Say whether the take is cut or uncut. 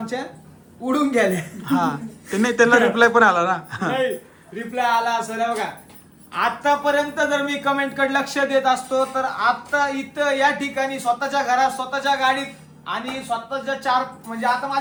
uncut